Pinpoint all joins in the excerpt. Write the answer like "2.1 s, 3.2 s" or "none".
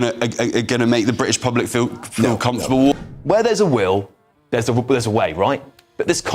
3.1 s